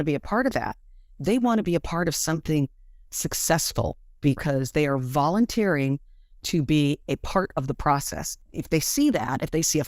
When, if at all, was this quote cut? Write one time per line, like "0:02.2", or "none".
0:08.2